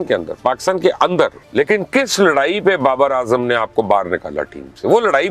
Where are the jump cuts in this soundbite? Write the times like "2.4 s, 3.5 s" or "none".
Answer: 1.4 s